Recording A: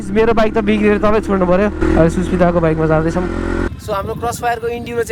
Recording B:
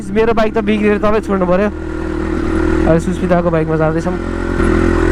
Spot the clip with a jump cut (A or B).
A